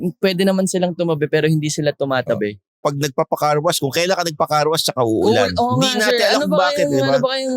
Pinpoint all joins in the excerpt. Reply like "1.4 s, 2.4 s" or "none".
2.8 s